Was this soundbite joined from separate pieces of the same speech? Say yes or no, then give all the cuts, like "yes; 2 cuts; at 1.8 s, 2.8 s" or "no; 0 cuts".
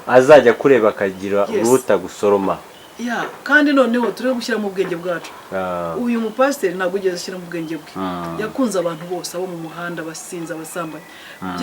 no; 0 cuts